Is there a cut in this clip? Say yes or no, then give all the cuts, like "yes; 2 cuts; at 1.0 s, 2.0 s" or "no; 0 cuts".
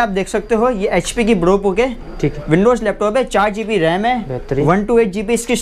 no; 0 cuts